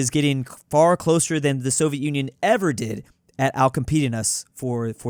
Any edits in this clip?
no; 0 cuts

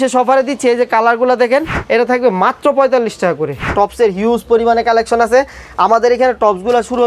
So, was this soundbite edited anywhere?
yes; 2 cuts; at 1.8 s, 3.7 s

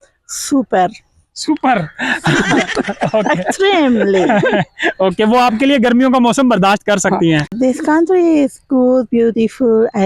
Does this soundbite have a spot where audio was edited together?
yes; 1 cut; at 7.5 s

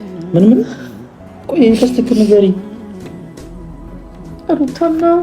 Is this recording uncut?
no; 2 cuts; at 2.6 s, 4.5 s

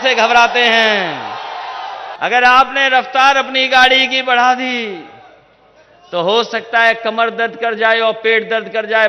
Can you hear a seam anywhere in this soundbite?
yes; 1 cut; at 2.1 s

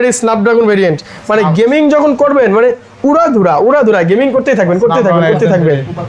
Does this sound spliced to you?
no; 0 cuts

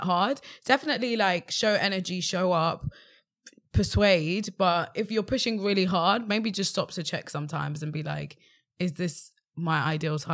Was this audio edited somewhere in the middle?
no; 0 cuts

